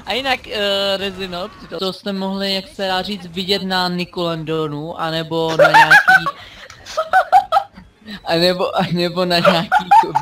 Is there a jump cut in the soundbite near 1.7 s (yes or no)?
yes